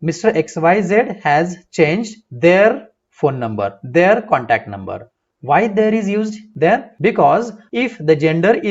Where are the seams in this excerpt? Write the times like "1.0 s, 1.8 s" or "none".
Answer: 6.9 s, 7.6 s